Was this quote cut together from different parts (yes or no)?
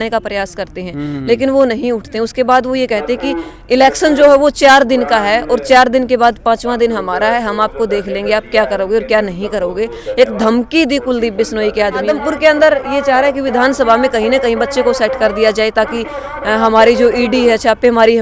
yes